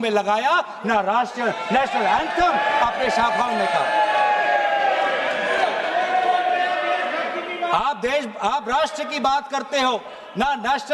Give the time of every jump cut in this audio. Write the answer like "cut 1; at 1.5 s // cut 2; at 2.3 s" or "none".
none